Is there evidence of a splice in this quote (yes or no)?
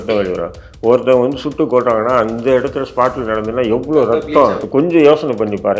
yes